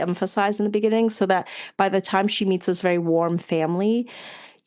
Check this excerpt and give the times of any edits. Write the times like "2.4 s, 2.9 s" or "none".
none